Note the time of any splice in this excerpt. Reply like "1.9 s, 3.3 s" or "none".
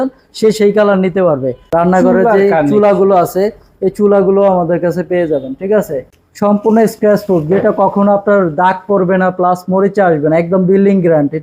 1.6 s, 6.0 s